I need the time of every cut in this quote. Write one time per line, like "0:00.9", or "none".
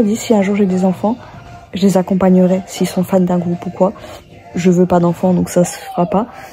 none